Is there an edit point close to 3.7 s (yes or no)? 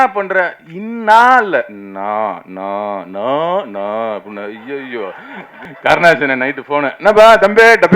no